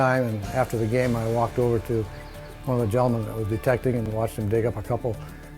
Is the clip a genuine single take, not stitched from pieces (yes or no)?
no